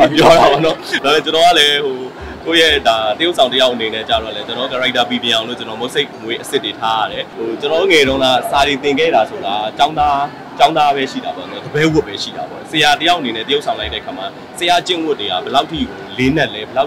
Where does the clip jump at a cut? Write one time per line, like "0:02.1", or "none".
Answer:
0:07.3